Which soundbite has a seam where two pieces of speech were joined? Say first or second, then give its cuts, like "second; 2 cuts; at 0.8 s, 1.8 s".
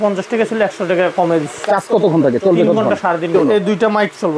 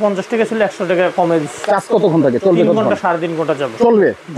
first; 1 cut; at 3.3 s